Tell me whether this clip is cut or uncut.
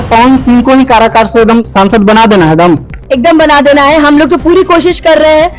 uncut